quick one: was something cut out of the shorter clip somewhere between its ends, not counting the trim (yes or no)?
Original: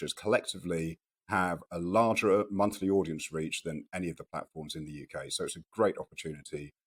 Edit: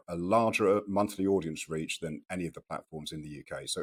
no